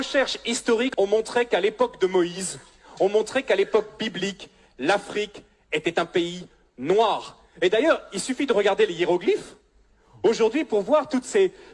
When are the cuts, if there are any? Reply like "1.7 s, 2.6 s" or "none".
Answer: 0.9 s